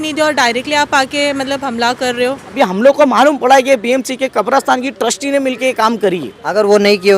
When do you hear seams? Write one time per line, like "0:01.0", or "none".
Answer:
0:02.5